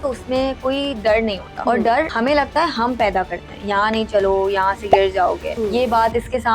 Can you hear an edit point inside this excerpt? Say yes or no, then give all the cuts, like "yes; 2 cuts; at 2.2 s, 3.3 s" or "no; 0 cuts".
yes; 3 cuts; at 1.5 s, 2.1 s, 5.5 s